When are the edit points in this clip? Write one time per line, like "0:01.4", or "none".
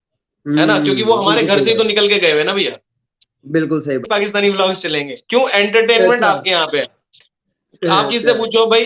0:04.1